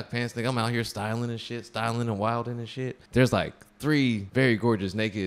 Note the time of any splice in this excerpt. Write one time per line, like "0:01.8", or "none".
0:03.0
0:04.2